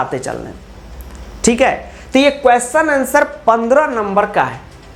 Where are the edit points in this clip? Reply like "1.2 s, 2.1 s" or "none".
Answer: none